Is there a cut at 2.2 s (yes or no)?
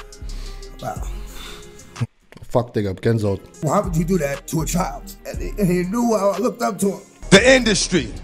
no